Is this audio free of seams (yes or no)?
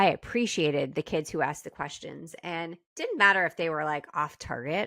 yes